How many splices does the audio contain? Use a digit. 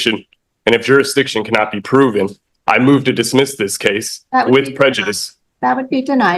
0